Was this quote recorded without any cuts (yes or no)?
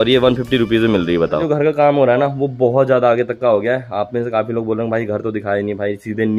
no